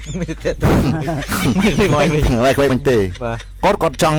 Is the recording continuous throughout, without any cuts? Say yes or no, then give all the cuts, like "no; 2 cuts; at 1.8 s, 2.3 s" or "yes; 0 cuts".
yes; 0 cuts